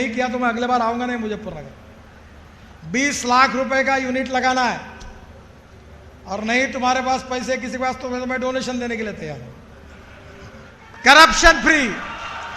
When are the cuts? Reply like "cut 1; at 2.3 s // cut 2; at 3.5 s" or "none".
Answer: cut 1; at 10.8 s